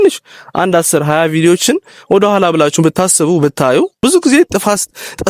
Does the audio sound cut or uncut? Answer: cut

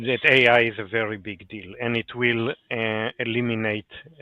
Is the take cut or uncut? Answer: uncut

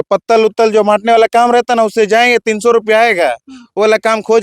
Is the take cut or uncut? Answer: uncut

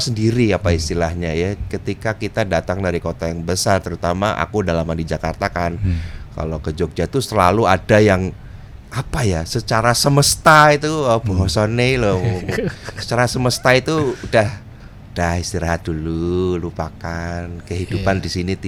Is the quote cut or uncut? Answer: uncut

